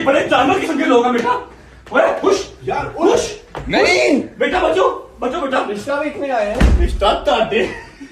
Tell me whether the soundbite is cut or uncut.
uncut